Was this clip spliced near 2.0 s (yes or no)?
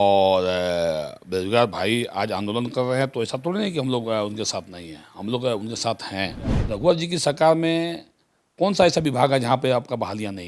no